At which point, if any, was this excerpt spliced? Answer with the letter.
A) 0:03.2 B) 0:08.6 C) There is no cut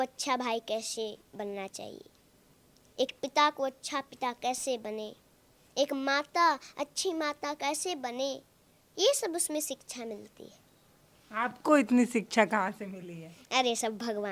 C